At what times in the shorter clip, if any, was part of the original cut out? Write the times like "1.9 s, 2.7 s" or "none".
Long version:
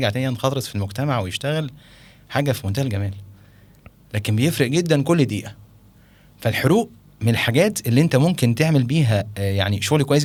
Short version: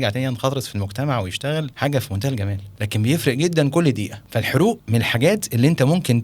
1.7 s, 2.7 s, 4.2 s, 4.8 s